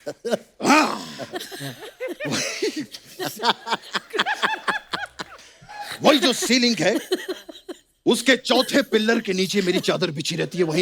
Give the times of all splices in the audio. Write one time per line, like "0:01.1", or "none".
none